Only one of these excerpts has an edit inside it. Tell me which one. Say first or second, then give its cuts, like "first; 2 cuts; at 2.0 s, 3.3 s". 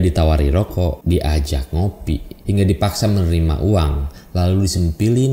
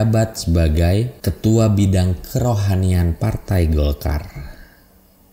first; 2 cuts; at 1.0 s, 2.3 s